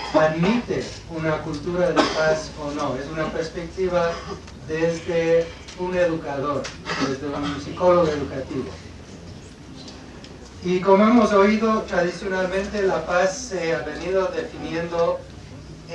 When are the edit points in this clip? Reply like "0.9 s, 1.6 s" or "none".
14.9 s